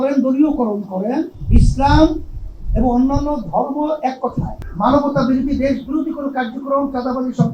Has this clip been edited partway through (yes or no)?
yes